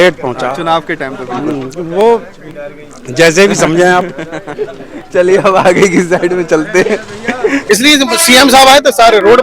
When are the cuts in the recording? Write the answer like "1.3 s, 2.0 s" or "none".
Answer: 7.6 s